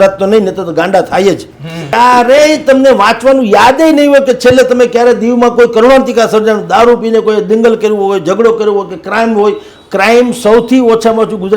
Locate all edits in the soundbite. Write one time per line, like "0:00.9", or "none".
0:01.9